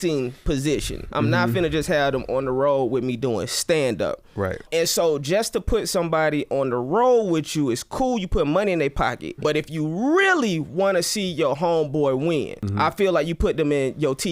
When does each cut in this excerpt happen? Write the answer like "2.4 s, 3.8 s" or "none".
4.7 s, 9.3 s, 12.6 s

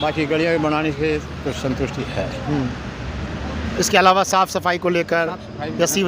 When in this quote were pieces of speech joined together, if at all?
none

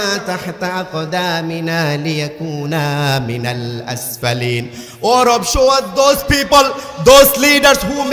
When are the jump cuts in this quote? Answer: none

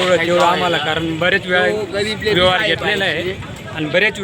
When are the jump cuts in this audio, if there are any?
none

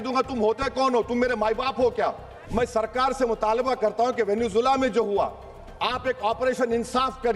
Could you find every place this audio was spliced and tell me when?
2.4 s

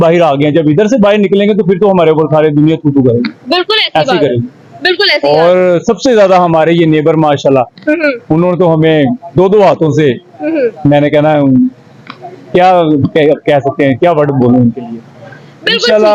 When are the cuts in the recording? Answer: none

